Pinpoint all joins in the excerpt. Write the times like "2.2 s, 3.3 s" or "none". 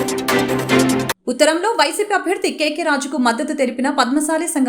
1.1 s